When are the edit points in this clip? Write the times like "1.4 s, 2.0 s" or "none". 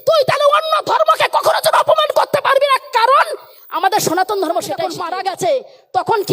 5.0 s